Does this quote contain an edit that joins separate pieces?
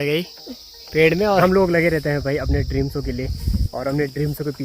yes; 1 cut; at 1.4 s

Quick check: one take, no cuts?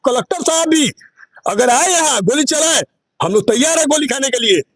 yes; 0 cuts

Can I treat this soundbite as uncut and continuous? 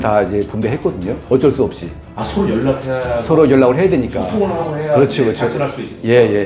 yes; 0 cuts

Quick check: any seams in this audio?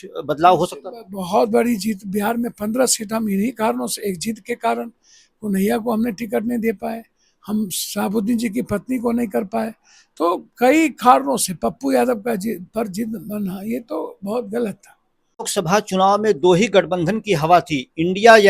yes; 1 cut; at 15.5 s

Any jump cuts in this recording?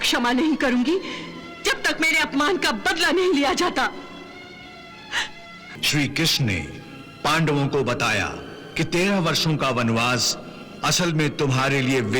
yes; 1 cut; at 5.7 s

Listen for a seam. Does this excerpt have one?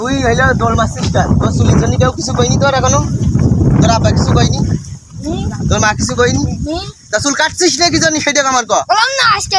no; 0 cuts

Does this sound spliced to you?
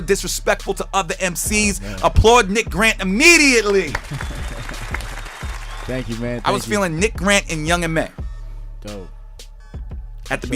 yes; 1 cut; at 1.6 s

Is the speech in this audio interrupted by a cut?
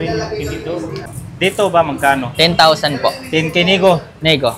yes; 1 cut; at 1.0 s

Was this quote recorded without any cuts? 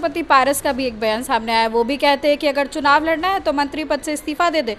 yes; 0 cuts

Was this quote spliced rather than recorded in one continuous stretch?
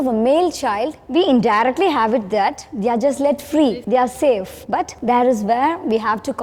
yes; 4 cuts; at 0.9 s, 2.7 s, 3.8 s, 4.8 s

